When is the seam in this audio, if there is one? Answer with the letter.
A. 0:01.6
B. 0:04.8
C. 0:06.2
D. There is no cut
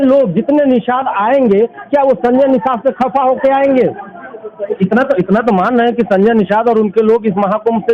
B